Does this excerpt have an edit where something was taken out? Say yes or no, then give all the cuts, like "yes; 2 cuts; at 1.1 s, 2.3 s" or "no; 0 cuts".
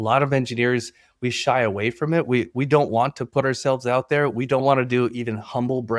yes; 1 cut; at 4.6 s